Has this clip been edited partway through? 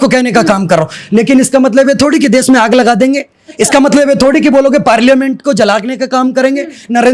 no; 0 cuts

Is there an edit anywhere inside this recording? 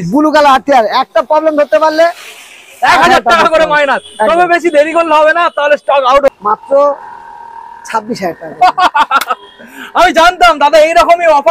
yes; 1 cut; at 6.3 s

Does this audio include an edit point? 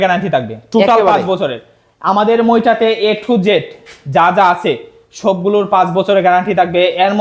no; 0 cuts

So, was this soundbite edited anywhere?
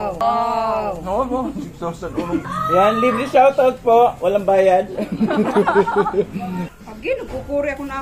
yes; 3 cuts; at 0.9 s, 2.4 s, 6.7 s

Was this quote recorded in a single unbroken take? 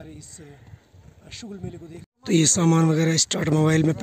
no; 1 cut; at 2.1 s

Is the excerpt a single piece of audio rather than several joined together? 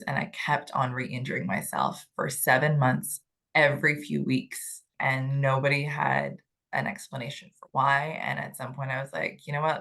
no; 1 cut; at 4.9 s

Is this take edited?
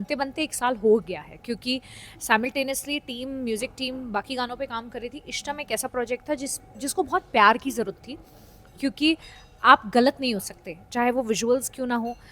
no; 0 cuts

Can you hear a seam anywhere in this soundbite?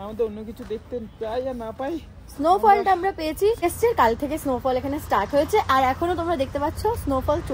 yes; 1 cut; at 3.6 s

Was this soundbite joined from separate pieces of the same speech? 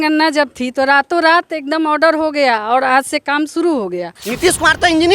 yes; 1 cut; at 4.2 s

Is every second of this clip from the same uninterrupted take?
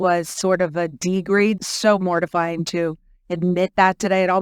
no; 1 cut; at 1.6 s

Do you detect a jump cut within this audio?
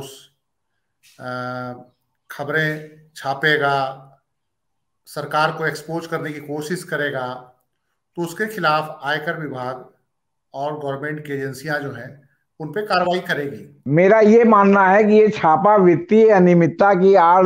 yes; 1 cut; at 13.8 s

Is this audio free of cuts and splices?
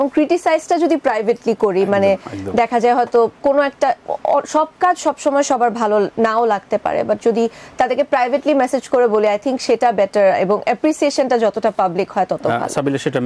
yes; 0 cuts

